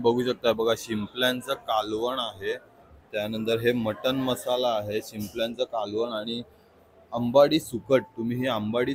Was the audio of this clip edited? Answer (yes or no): no